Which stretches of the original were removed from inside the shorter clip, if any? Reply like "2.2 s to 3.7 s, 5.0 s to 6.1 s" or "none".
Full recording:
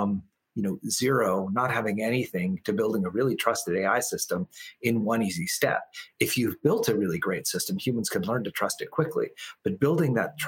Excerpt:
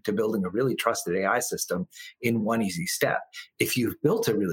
none